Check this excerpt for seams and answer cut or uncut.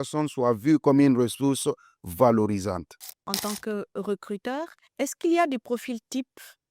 cut